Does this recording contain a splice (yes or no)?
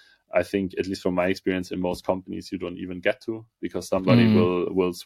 no